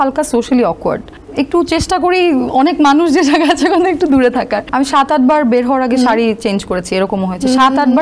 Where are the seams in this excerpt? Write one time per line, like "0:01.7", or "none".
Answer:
0:01.2
0:04.6